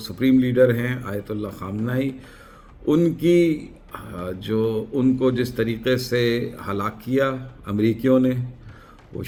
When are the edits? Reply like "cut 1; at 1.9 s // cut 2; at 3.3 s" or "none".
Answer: none